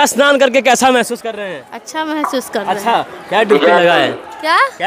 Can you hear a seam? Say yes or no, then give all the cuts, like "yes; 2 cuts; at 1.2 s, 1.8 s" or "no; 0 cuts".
no; 0 cuts